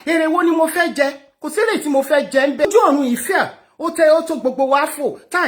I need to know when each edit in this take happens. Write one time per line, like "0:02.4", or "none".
0:02.7